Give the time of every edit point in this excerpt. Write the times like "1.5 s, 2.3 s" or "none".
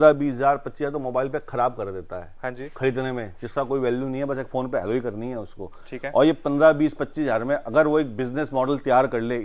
none